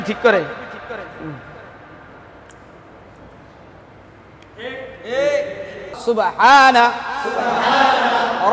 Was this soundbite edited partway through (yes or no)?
yes